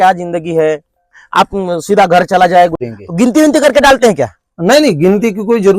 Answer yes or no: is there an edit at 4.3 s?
no